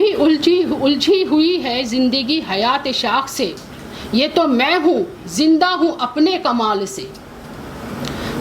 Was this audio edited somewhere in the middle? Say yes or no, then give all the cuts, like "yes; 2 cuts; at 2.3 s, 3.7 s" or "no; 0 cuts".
no; 0 cuts